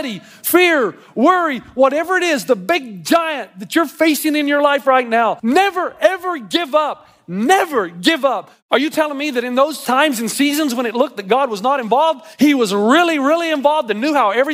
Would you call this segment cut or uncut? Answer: cut